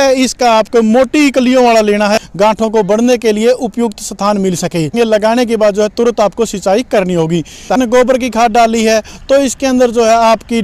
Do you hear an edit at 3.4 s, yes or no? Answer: no